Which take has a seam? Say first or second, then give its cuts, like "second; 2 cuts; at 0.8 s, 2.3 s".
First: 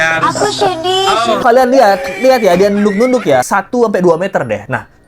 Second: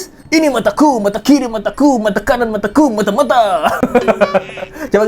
first; 2 cuts; at 1.4 s, 3.5 s